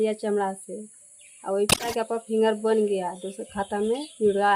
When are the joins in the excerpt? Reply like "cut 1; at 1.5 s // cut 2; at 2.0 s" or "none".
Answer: cut 1; at 1.9 s